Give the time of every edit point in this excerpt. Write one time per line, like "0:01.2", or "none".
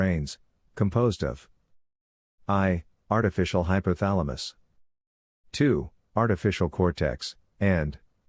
0:01.2